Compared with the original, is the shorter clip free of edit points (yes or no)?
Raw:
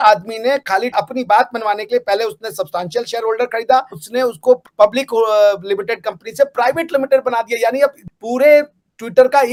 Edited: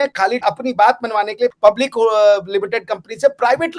no